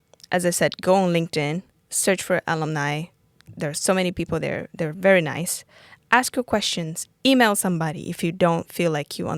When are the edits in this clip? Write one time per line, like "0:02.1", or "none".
none